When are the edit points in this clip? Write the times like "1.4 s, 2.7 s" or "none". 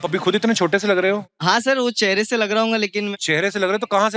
1.2 s, 3.1 s